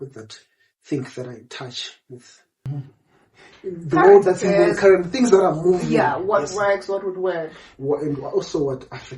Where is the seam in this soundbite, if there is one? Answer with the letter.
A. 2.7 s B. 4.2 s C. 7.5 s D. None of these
A